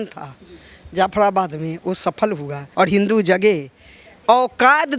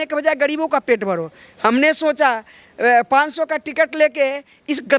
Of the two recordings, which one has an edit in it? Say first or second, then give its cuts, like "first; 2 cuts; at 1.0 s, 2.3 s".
first; 1 cut; at 2.6 s